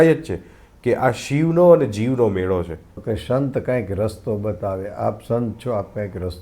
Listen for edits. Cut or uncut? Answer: cut